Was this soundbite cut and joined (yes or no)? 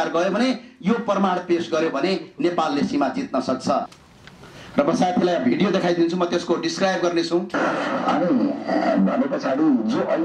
yes